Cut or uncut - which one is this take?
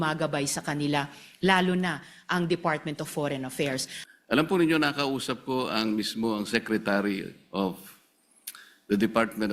cut